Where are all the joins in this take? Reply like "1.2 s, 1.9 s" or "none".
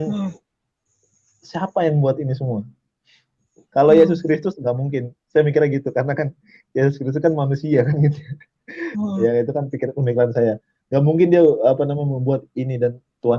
none